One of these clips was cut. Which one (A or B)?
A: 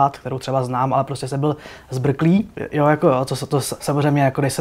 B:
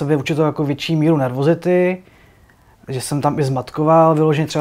A